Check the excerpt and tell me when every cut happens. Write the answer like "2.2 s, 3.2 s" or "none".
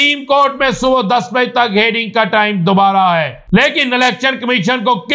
3.4 s